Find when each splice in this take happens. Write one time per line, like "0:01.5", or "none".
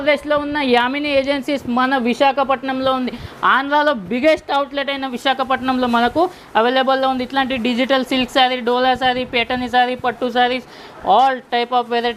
none